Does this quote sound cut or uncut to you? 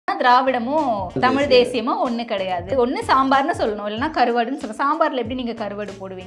cut